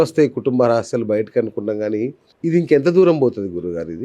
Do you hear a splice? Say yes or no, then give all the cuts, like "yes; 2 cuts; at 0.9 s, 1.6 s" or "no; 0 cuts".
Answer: yes; 1 cut; at 2.3 s